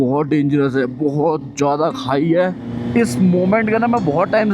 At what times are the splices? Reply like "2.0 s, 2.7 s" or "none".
2.7 s